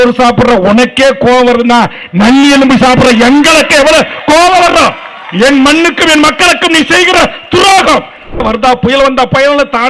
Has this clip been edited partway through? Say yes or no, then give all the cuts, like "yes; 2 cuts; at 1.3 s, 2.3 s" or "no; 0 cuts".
yes; 1 cut; at 8.4 s